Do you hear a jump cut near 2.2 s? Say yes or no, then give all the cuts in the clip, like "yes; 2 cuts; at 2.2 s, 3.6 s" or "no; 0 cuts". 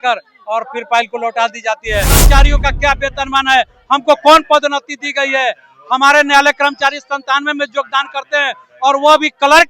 yes; 1 cut; at 2.2 s